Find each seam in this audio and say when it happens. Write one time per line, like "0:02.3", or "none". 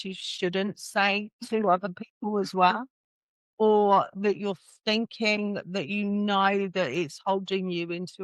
none